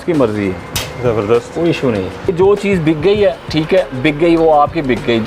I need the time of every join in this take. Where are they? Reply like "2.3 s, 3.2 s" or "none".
2.3 s, 3.5 s